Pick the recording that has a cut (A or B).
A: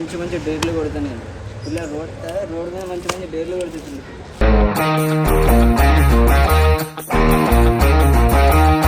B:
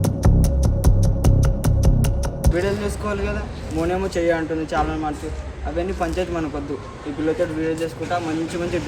B